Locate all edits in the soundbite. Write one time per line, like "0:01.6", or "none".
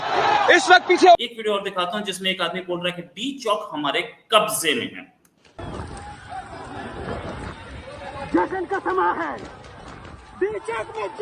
none